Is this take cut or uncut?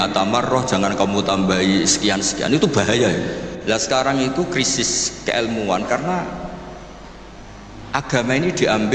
cut